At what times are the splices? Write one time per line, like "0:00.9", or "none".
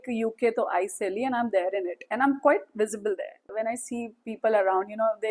0:03.4